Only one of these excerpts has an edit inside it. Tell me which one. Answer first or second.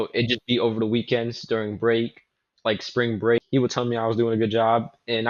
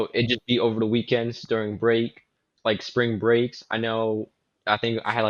first